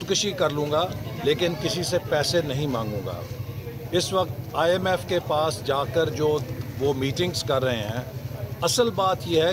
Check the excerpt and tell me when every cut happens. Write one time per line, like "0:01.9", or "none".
none